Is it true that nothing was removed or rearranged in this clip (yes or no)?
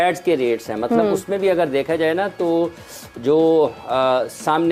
yes